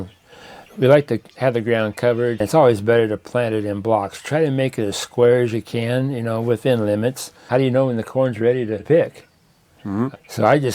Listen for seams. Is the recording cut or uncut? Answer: cut